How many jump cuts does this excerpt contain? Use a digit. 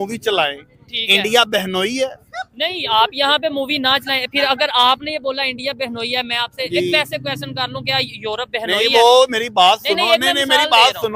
0